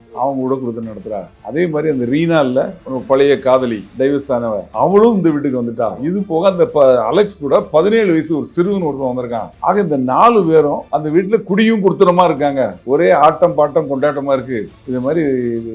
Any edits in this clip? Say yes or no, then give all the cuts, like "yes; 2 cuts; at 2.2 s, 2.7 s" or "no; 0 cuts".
yes; 3 cuts; at 4.1 s, 6.0 s, 14.7 s